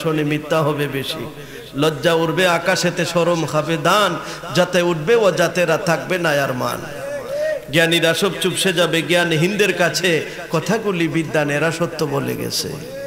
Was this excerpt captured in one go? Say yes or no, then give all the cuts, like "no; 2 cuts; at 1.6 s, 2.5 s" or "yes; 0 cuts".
yes; 0 cuts